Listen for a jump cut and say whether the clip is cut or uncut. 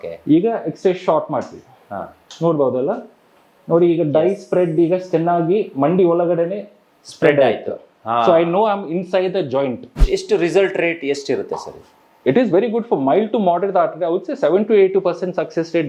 cut